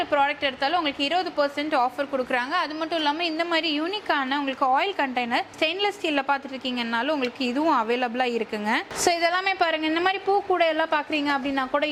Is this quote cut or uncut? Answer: uncut